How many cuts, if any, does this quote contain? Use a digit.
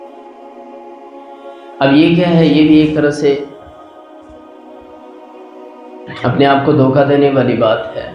0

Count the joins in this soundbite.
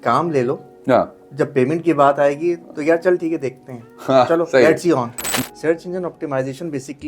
1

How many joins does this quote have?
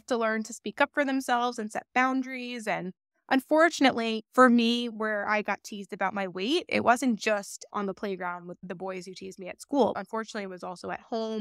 0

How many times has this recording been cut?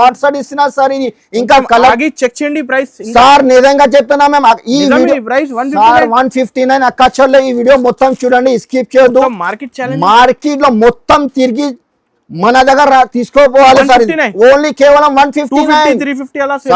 0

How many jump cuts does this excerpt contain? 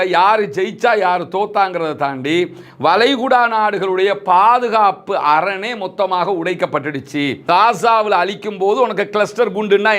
1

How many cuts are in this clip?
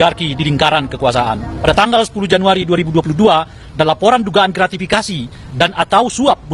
1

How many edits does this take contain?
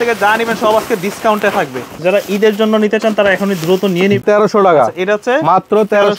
2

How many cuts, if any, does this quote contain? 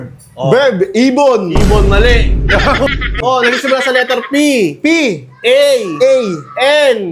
1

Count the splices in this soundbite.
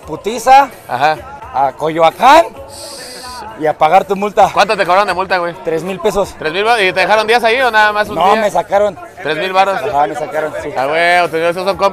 0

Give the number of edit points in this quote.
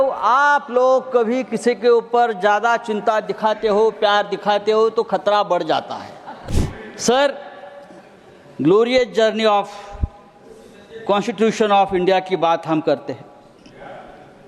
1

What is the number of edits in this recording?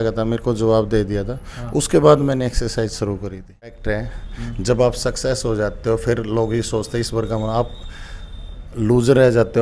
1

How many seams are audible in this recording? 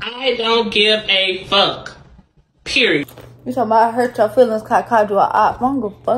1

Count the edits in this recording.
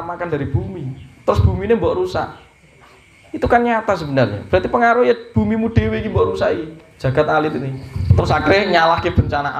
1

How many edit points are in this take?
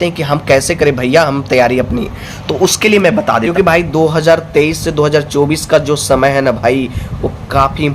1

